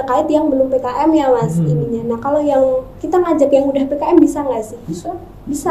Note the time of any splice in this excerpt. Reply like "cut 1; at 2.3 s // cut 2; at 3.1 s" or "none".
none